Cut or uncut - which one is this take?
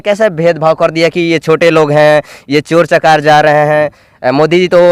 uncut